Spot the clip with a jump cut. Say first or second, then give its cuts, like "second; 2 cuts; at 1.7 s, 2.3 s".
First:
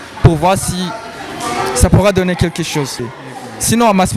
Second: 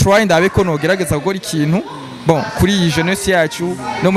first; 1 cut; at 3.0 s